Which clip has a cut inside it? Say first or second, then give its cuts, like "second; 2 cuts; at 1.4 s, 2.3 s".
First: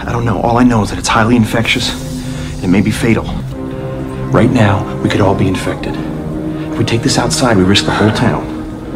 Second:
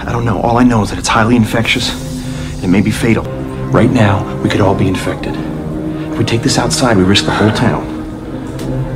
second; 1 cut; at 3.3 s